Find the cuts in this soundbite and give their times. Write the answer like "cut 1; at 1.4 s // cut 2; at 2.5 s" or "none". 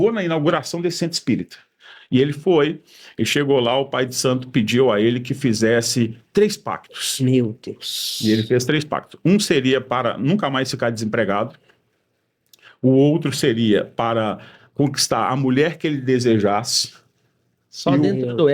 none

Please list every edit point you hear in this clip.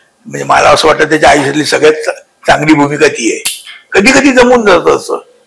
cut 1; at 3.7 s

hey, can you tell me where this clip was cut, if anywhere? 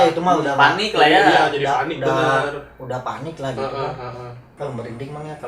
cut 1; at 4.4 s

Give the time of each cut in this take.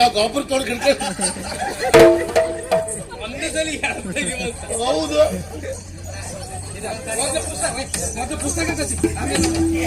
none

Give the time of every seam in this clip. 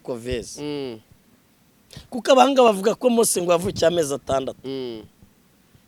none

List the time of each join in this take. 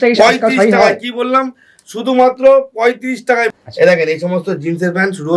cut 1; at 3.5 s

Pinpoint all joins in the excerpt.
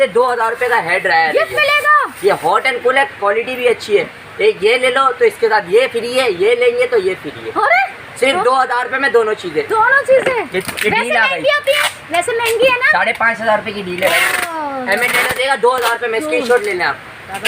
none

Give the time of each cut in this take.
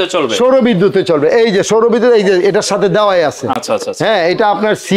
none

